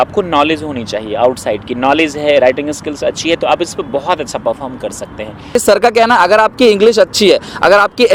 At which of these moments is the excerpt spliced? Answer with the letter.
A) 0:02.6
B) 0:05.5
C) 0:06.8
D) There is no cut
B